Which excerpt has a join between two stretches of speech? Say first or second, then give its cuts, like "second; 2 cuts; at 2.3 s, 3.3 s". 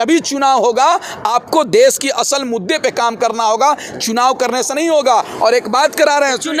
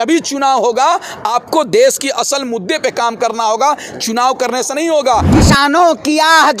second; 1 cut; at 5.3 s